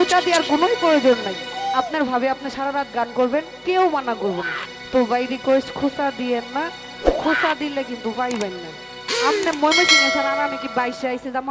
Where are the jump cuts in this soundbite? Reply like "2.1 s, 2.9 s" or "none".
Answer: none